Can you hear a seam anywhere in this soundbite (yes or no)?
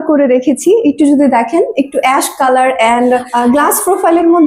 yes